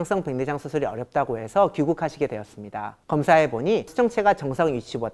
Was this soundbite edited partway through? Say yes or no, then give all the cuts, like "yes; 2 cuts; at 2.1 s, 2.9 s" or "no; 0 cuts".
yes; 1 cut; at 3.9 s